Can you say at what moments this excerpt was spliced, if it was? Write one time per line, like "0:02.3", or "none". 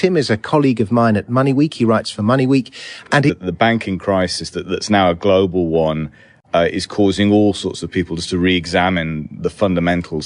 none